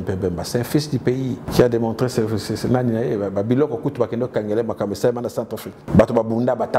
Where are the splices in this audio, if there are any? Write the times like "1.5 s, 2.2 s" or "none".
1.5 s, 5.8 s